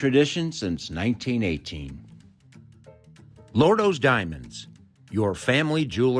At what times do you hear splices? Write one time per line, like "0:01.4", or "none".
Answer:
0:02.0
0:03.5